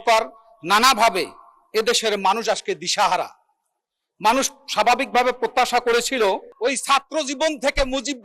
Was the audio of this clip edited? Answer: yes; 1 cut; at 6.5 s

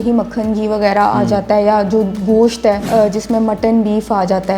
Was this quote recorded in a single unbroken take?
no; 1 cut; at 2.8 s

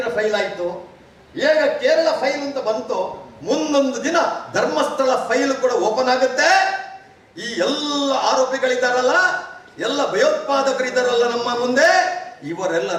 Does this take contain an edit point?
no; 0 cuts

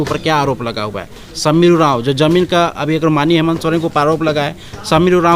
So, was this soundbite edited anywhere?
no; 0 cuts

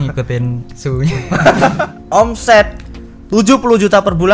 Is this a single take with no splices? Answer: no; 1 cut; at 1.8 s

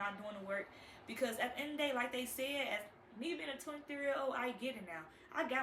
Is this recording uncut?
yes; 0 cuts

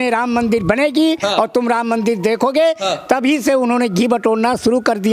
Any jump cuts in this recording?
no; 0 cuts

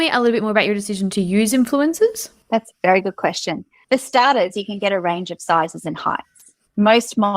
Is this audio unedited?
yes; 0 cuts

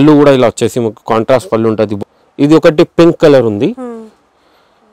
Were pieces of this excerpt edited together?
yes; 1 cut; at 2.0 s

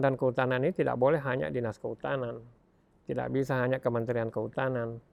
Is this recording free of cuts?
yes; 0 cuts

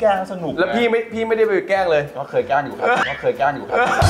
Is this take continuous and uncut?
yes; 0 cuts

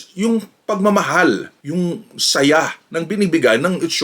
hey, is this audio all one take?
no; 1 cut; at 1.6 s

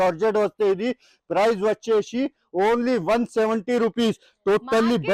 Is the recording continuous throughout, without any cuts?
yes; 0 cuts

